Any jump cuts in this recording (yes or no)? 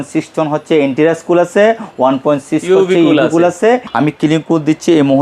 yes